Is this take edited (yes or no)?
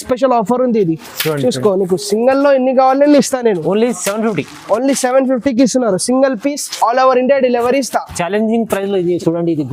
no